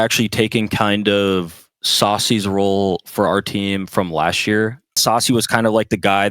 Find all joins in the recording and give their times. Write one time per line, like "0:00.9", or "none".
0:05.0